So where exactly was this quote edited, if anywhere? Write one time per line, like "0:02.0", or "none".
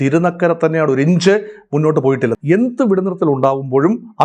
0:02.4

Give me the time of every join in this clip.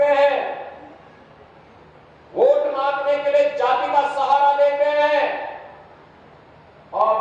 none

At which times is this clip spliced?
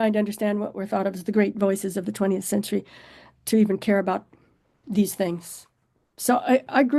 none

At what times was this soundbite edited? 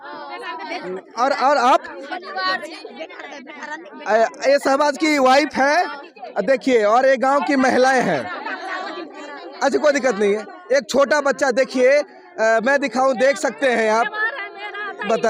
none

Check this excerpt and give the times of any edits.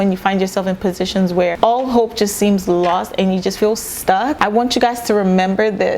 0:01.6
0:04.3

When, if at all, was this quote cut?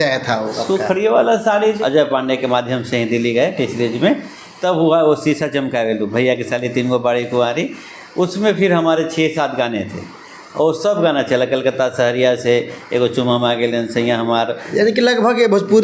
0:01.8
0:14.6

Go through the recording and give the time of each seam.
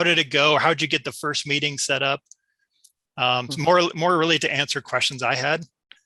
none

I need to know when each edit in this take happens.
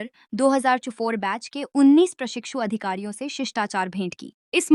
none

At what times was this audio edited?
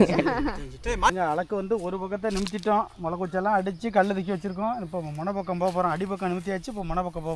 0:01.1

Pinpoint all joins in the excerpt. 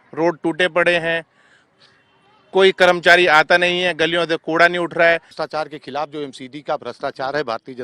0:05.4

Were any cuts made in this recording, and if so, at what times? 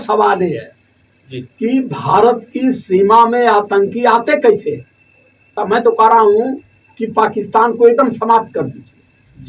0:05.6

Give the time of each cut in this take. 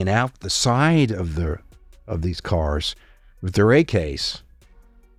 none

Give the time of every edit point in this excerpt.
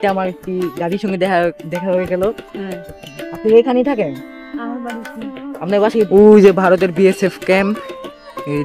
0:06.1

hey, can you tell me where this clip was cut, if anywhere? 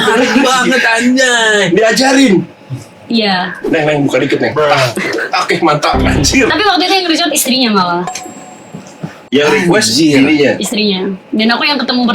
none

